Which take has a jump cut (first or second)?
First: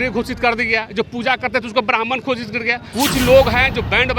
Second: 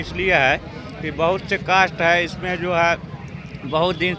first